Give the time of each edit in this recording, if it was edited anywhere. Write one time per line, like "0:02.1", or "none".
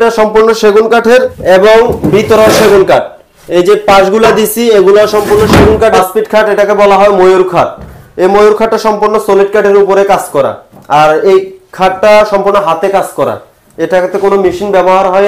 0:01.3
0:06.0